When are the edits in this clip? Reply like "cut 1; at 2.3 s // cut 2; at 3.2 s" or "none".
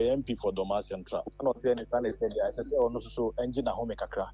none